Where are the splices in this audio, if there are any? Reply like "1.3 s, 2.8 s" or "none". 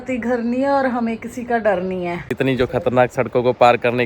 2.3 s